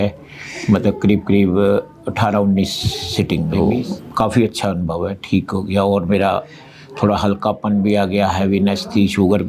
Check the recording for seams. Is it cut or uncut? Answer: cut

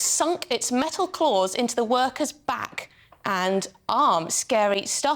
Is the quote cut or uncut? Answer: uncut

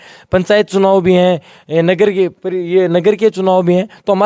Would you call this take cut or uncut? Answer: uncut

